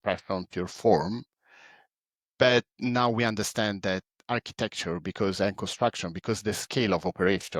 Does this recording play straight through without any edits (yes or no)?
yes